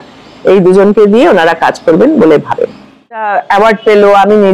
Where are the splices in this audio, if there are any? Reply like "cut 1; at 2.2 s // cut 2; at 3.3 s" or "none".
cut 1; at 3.2 s